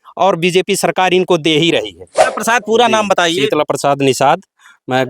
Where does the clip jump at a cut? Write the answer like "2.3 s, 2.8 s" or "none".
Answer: 2.3 s